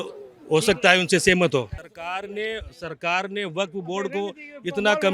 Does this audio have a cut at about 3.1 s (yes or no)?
no